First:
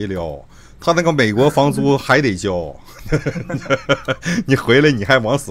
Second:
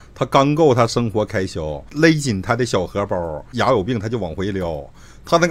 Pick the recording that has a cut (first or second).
second